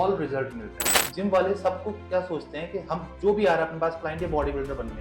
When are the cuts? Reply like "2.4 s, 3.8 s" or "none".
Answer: 1.0 s